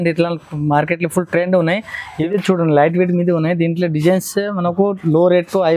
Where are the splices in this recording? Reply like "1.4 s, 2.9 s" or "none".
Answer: 2.1 s